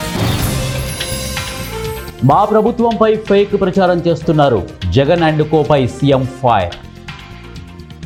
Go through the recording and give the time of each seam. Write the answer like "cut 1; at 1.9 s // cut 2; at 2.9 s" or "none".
none